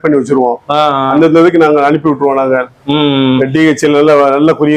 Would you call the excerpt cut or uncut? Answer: uncut